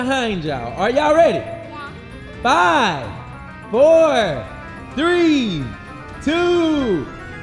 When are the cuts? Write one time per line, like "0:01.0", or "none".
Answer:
none